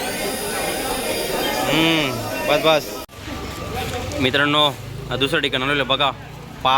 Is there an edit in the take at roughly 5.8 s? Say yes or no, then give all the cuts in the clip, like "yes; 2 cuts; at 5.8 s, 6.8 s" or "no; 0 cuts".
no; 1 cut; at 3.0 s